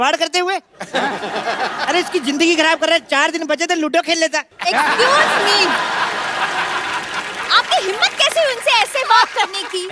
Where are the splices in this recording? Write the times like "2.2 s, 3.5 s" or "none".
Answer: none